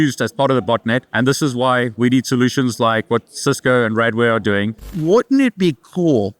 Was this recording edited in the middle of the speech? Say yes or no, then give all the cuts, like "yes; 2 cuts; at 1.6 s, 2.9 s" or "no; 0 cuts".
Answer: yes; 2 cuts; at 1.1 s, 4.9 s